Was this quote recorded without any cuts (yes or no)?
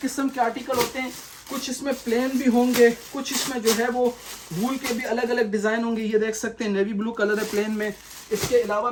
yes